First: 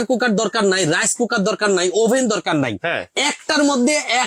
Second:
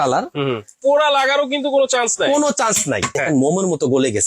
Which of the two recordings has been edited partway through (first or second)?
second